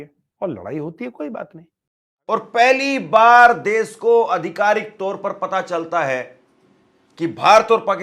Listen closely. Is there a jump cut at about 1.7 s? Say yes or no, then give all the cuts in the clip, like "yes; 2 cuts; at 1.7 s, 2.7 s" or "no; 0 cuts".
yes; 1 cut; at 1.7 s